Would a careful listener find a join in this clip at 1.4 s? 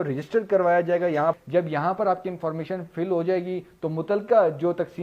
yes; 1 cut; at 1.4 s

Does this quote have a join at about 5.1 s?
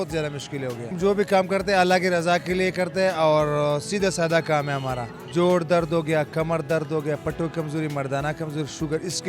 yes; 2 cuts; at 0.9 s, 5.1 s

